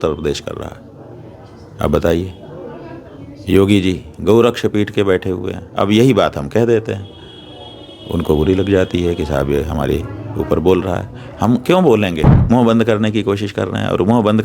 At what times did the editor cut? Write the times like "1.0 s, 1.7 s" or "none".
12.3 s